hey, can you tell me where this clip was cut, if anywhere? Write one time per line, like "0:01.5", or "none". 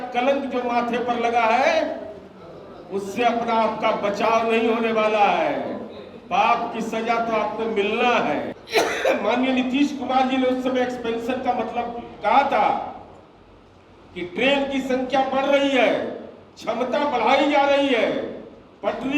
0:08.6